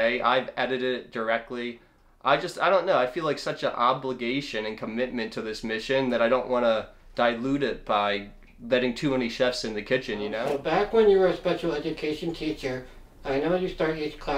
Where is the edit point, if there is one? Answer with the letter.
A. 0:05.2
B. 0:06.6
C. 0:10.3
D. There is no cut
C